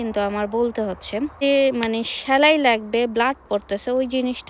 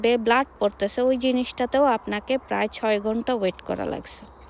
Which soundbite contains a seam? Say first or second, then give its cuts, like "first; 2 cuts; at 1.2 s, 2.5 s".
first; 1 cut; at 1.4 s